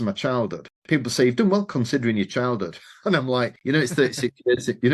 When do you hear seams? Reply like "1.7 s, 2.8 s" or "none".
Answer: 3.6 s